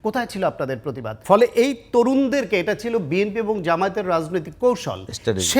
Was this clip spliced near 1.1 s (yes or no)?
yes